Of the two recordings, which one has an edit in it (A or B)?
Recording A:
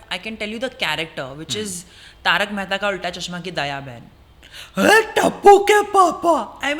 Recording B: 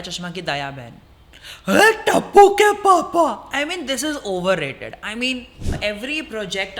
B